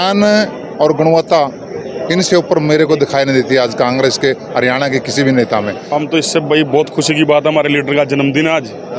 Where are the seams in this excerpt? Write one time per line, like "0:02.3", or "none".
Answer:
0:05.8

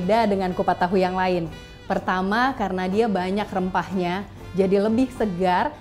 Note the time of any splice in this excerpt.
0:04.4

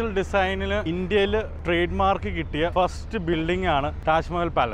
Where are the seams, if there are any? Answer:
0:00.8
0:01.5
0:02.7
0:04.0

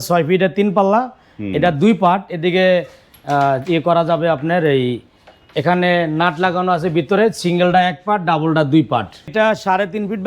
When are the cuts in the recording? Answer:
0:09.3

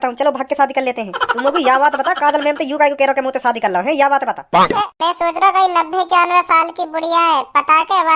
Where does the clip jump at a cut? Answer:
0:01.1
0:04.9

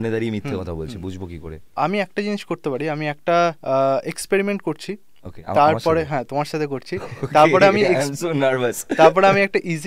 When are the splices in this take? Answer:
0:01.7

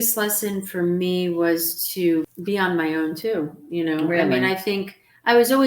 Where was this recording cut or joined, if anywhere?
0:02.3

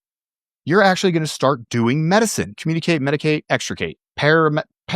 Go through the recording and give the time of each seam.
0:02.6
0:04.0

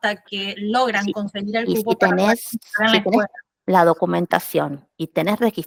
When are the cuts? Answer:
none

